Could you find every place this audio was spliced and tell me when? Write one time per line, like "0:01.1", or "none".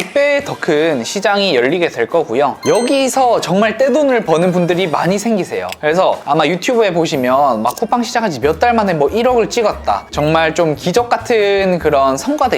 0:10.1